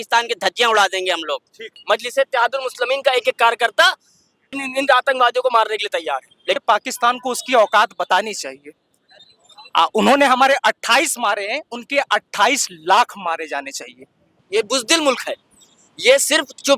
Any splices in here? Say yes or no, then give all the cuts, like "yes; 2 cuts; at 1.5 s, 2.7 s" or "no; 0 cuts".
yes; 4 cuts; at 1.8 s, 4.5 s, 6.6 s, 14.4 s